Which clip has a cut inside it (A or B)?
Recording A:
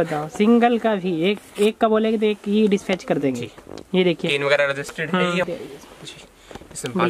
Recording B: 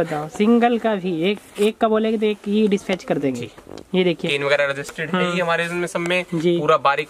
A